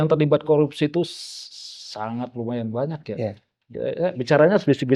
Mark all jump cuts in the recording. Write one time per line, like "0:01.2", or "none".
none

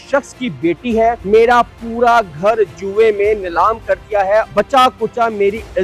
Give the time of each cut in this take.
0:01.2
0:04.5

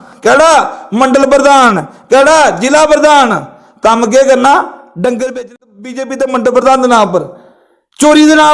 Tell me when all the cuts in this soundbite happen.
0:05.5

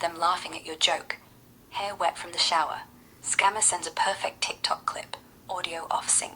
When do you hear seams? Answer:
none

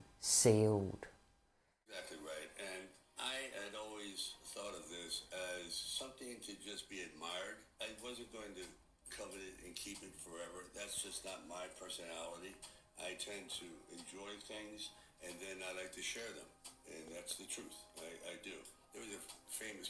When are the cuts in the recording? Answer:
0:01.9

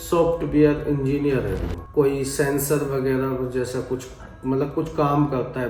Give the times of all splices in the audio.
none

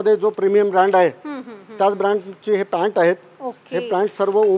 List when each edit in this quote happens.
none

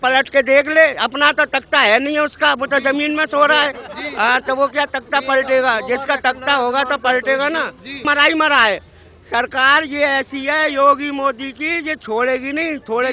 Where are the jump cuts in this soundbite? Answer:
0:08.1

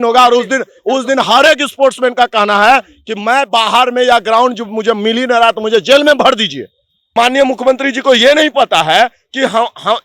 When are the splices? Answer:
0:07.1

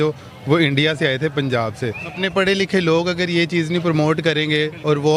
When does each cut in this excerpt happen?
0:02.1

